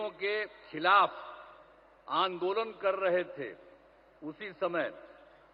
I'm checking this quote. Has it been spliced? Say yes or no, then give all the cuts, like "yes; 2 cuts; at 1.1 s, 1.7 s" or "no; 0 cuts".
no; 0 cuts